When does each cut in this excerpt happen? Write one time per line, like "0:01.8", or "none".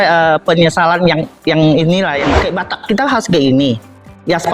0:02.4